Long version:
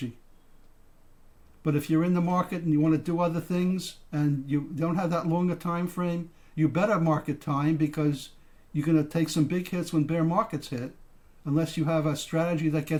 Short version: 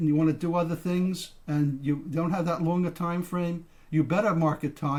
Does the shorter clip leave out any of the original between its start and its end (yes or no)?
no